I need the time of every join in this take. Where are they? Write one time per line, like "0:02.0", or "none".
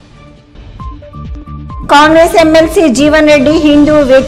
0:01.3